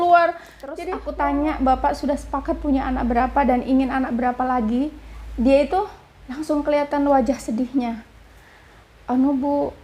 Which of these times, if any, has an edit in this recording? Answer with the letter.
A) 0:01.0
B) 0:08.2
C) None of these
A